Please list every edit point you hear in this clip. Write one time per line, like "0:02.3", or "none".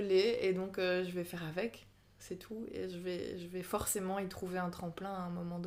none